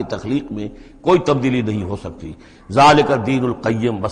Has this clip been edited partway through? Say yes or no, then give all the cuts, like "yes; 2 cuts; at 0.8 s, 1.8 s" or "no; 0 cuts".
no; 0 cuts